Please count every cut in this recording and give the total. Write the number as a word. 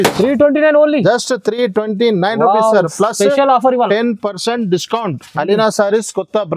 zero